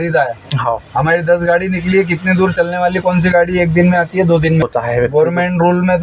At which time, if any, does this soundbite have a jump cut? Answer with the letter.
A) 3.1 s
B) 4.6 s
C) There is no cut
B